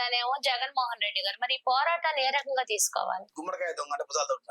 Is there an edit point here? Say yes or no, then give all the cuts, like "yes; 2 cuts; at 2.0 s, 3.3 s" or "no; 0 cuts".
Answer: yes; 1 cut; at 3.3 s